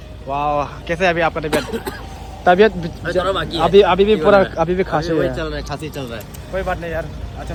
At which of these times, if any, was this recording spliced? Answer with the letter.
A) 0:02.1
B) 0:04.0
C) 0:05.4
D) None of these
D